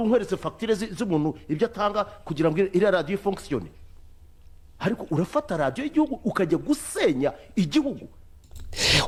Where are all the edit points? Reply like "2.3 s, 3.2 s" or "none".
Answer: none

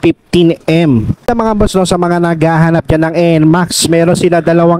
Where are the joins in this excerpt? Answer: 1.3 s

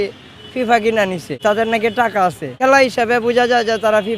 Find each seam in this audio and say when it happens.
1.3 s, 2.6 s

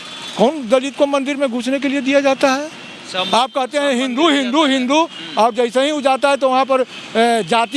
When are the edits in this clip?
none

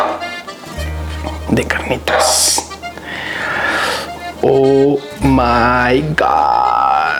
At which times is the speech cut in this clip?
none

